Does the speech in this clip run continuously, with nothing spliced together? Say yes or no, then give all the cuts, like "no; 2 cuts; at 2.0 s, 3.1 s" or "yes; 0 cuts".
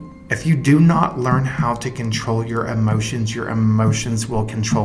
yes; 0 cuts